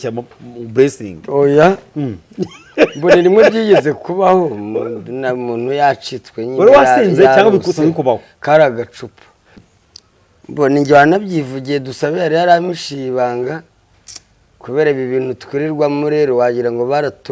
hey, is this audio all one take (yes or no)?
no